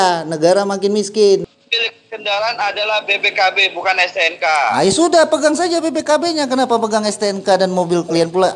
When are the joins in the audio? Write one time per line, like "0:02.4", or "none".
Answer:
0:01.5